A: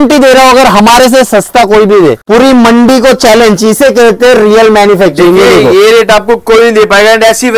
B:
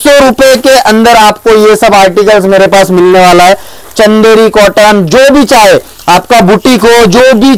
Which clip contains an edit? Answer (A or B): A